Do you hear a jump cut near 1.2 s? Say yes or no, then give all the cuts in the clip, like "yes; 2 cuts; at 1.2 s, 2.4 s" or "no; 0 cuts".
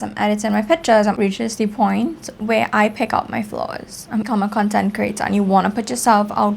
yes; 2 cuts; at 1.2 s, 4.3 s